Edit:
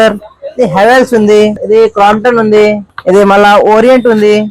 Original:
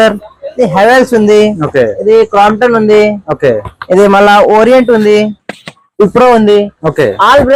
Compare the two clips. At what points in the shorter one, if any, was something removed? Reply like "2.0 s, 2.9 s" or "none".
1.6 s, 2.9 s